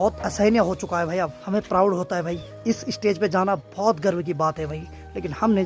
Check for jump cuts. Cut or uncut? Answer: cut